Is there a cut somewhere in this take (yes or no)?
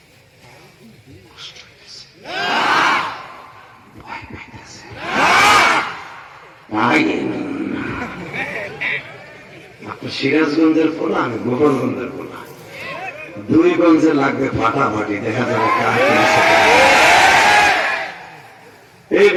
no